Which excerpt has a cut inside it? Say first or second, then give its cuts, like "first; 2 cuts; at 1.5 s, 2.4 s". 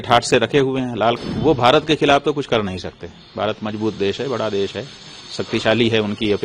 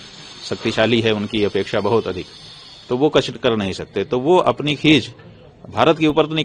first; 1 cut; at 1.2 s